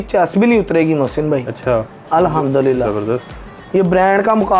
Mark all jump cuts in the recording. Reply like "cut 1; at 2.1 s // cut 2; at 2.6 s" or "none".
none